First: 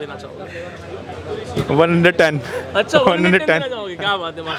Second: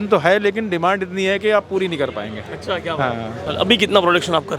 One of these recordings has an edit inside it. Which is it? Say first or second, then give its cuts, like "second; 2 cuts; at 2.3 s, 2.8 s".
second; 1 cut; at 3.5 s